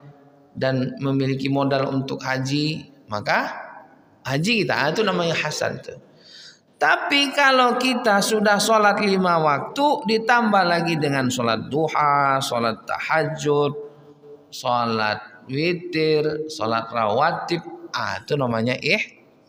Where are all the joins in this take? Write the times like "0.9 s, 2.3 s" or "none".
none